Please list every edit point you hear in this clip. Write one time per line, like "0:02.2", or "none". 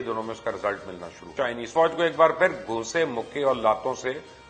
0:01.3